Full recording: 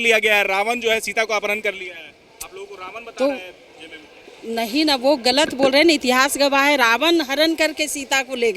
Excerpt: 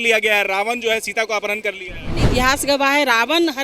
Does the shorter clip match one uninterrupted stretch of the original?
no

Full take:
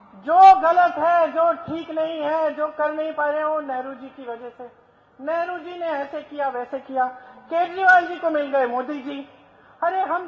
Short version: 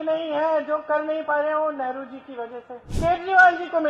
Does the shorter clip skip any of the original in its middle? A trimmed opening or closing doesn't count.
yes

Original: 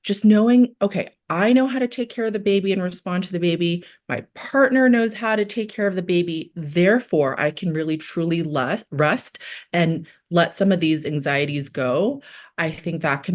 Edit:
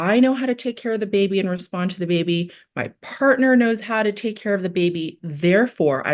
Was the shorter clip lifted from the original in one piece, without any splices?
yes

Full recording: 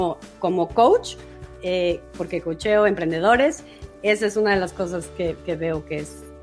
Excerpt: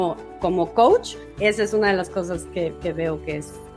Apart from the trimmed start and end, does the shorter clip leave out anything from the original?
yes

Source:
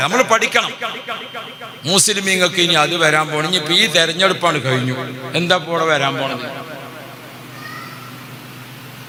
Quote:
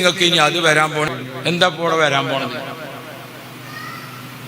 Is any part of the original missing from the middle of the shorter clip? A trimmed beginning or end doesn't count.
yes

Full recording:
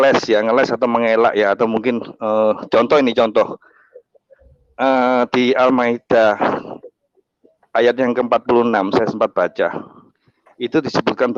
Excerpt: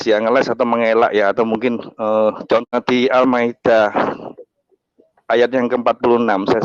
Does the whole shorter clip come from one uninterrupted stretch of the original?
no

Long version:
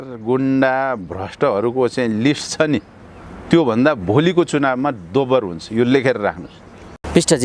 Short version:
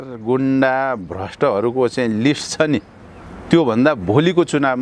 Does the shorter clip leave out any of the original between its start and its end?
no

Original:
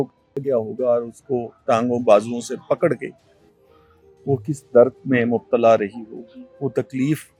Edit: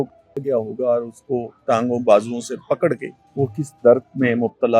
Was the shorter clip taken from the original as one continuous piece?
no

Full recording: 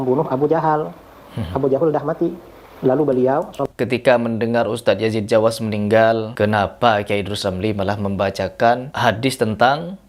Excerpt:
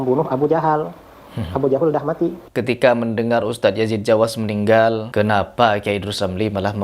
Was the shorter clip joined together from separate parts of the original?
yes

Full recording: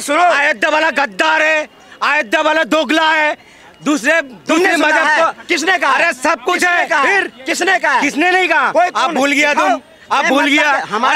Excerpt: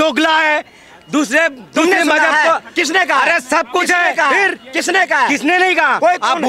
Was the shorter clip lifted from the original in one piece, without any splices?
yes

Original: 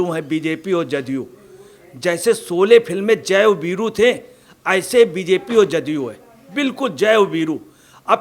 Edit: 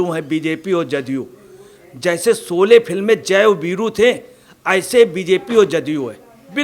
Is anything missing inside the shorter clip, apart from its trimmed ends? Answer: no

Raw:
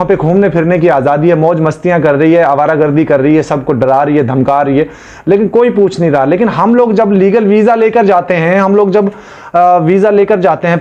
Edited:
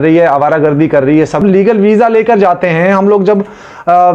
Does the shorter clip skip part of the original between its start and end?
yes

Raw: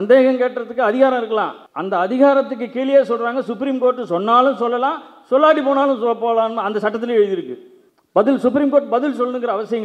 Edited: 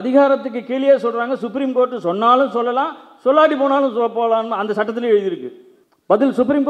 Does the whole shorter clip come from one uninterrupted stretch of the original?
yes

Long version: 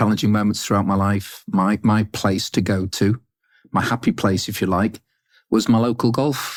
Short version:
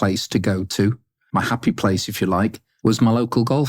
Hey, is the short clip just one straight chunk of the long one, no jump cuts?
no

